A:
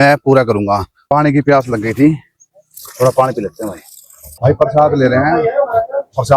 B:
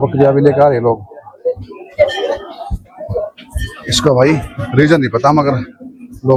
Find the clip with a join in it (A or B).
A